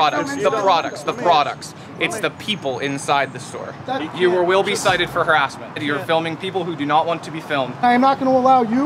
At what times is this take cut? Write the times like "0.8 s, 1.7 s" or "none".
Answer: 4.1 s, 5.8 s, 7.8 s